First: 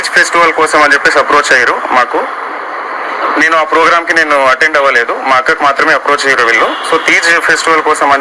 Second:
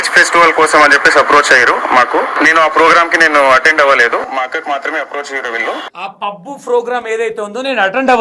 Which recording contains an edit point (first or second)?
second